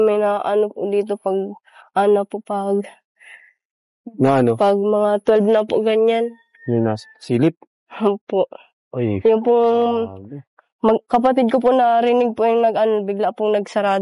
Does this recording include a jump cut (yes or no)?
yes